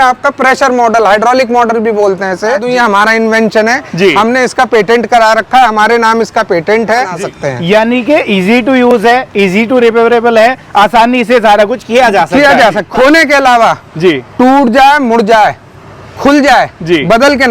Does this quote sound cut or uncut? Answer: cut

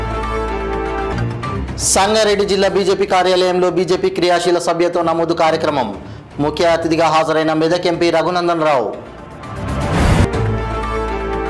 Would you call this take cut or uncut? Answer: cut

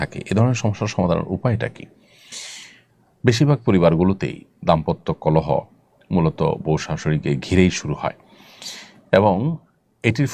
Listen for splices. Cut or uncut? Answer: uncut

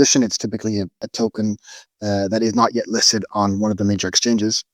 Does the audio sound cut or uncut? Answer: cut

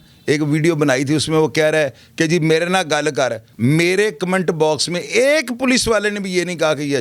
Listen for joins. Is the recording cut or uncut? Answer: cut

